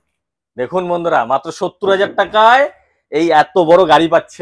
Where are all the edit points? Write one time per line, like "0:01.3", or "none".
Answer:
none